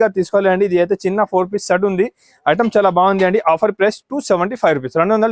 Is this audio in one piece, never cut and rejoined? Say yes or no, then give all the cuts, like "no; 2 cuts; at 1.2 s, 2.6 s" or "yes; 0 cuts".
yes; 0 cuts